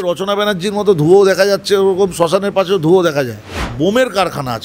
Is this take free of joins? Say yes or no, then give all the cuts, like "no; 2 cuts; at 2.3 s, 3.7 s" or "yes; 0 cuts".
no; 1 cut; at 3.6 s